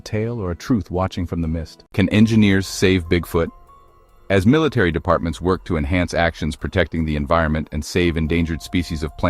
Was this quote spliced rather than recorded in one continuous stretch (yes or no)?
yes